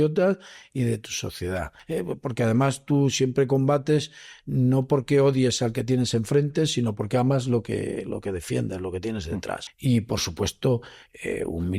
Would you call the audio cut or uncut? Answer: cut